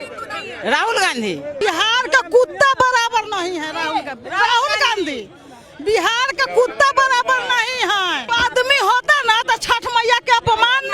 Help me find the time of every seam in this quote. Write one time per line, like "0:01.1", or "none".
0:01.5